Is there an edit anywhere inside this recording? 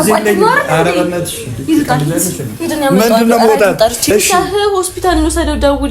yes; 1 cut; at 4.1 s

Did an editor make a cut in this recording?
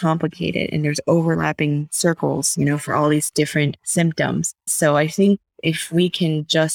yes; 2 cuts; at 3.8 s, 4.7 s

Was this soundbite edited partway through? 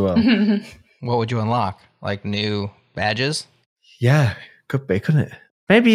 no; 0 cuts

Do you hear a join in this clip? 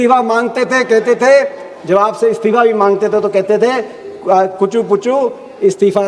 no; 0 cuts

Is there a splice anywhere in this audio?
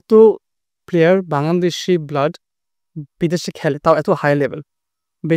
no; 0 cuts

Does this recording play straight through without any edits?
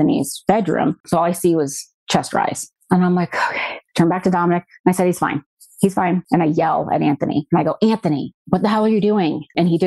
no; 1 cut; at 1.0 s

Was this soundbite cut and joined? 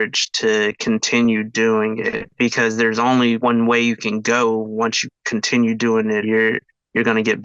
no; 0 cuts

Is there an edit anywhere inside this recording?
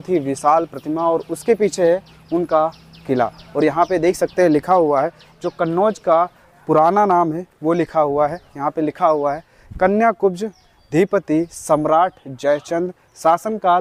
no; 0 cuts

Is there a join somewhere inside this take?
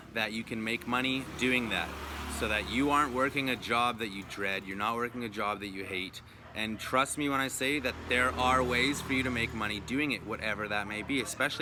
no; 0 cuts

